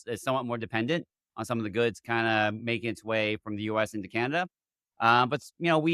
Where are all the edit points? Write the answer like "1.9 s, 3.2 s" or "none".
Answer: none